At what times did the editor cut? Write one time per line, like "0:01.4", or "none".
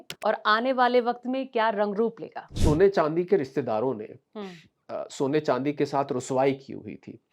0:02.5